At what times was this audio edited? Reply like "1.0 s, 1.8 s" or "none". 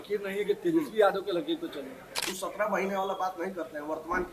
2.3 s